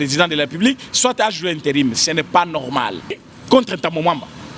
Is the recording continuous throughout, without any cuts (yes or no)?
no